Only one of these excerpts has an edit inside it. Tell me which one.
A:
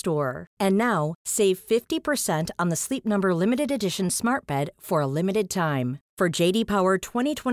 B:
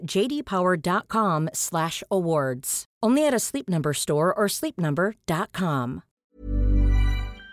B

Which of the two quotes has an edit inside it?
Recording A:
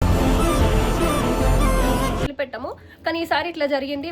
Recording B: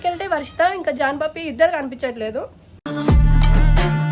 A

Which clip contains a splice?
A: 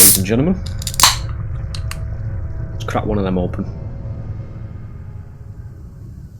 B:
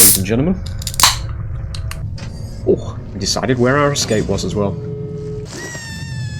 B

